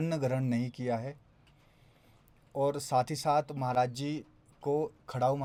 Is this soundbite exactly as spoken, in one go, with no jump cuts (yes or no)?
yes